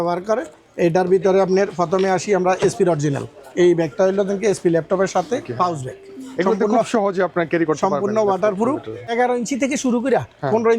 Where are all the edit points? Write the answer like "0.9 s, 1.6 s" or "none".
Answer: 5.5 s, 9.1 s